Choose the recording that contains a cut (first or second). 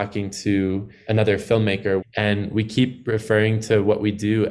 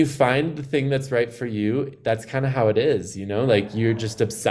first